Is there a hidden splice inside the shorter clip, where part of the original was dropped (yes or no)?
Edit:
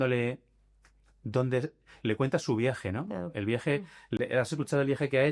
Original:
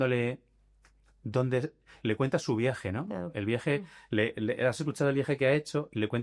yes